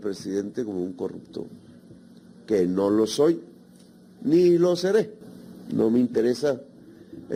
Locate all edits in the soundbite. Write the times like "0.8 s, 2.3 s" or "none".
none